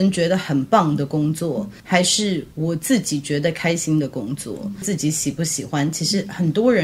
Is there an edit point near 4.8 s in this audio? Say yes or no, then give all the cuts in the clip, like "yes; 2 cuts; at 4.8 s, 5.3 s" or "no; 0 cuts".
yes; 2 cuts; at 1.8 s, 4.8 s